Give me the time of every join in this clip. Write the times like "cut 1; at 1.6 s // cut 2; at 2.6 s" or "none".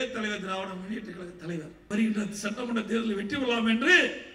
cut 1; at 1.9 s